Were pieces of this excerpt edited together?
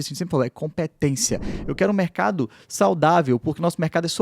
yes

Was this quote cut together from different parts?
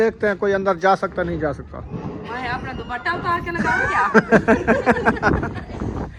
no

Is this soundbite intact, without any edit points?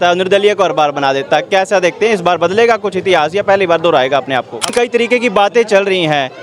no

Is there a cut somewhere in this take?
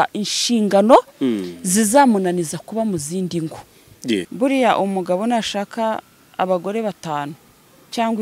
yes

